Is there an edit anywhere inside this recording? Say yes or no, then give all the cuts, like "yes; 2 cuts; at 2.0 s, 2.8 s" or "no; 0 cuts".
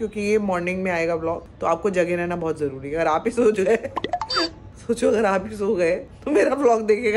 no; 0 cuts